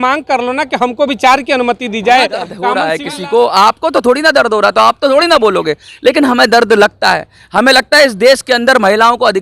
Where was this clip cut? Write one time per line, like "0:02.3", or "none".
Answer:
0:02.6